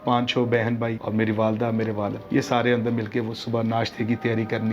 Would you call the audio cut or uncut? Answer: cut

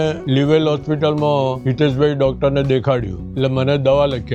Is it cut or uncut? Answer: cut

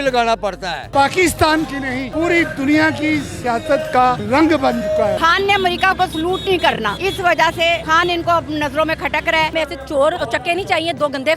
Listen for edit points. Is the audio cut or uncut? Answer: cut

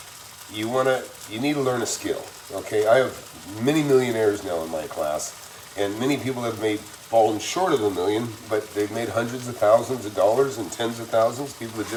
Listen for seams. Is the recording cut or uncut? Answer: uncut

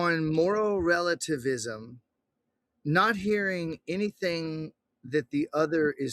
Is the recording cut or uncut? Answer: uncut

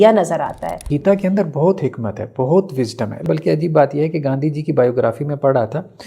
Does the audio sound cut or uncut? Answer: cut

